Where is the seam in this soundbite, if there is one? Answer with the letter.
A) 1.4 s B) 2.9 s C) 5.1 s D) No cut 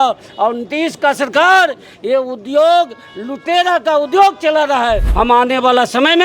C